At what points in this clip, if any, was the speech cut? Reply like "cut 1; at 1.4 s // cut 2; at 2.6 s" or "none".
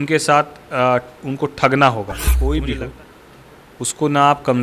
cut 1; at 2.3 s